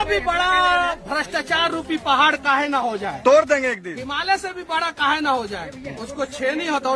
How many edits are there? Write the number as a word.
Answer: zero